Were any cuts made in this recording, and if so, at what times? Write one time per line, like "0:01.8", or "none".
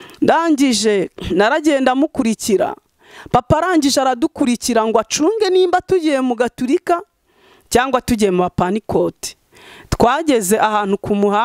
none